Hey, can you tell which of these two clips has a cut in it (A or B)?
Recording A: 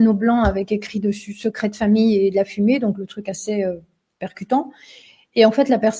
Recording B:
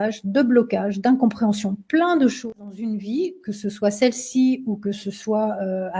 B